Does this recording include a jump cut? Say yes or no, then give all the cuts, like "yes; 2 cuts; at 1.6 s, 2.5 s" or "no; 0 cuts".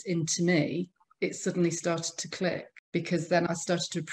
yes; 1 cut; at 2.7 s